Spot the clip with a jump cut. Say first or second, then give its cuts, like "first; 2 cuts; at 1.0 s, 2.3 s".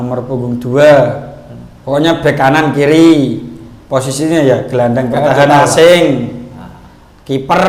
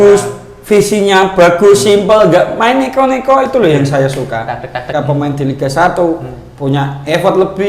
second; 1 cut; at 4.9 s